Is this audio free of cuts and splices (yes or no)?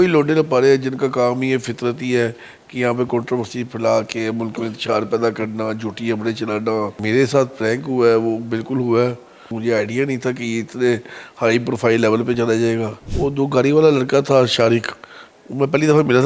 no